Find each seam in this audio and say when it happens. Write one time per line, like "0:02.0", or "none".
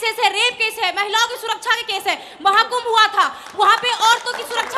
none